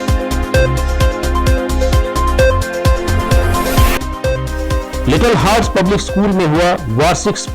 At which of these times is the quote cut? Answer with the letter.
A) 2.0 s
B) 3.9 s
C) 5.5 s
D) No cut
B